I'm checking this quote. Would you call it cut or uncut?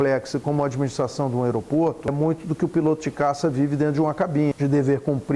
cut